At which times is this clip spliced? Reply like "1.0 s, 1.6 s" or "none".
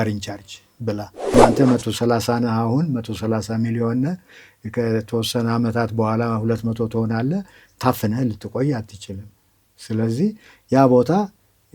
1.3 s